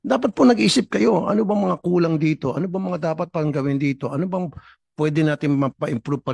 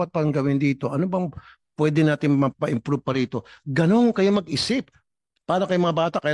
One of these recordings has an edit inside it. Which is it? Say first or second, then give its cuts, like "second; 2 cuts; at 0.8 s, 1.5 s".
second; 1 cut; at 5.0 s